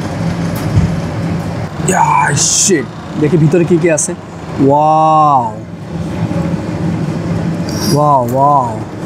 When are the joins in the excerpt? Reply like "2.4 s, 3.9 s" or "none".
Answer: 1.6 s